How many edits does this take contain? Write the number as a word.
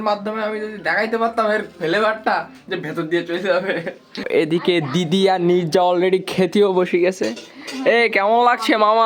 one